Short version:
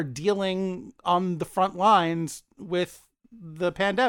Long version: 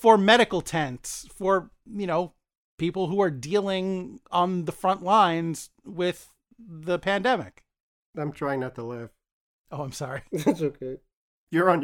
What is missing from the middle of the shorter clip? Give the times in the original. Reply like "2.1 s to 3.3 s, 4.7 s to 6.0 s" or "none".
none